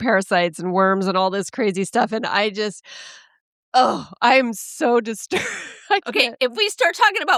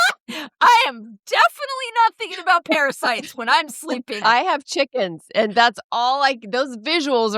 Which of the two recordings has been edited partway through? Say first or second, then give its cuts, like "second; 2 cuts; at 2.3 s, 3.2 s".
second; 1 cut; at 4.2 s